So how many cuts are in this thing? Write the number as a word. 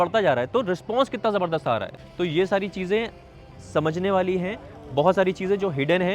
one